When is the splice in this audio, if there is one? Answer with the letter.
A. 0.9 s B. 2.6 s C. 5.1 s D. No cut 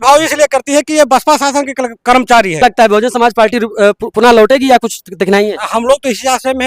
B